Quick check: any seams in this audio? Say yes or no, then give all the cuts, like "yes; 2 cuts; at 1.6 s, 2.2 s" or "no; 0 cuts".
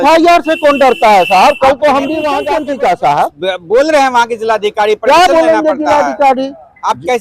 yes; 1 cut; at 2.4 s